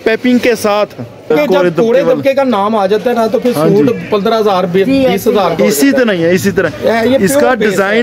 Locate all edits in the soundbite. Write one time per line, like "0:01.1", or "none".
0:01.3